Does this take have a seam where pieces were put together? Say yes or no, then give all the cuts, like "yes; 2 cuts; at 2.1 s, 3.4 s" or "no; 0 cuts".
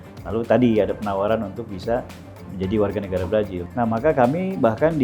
yes; 1 cut; at 3.6 s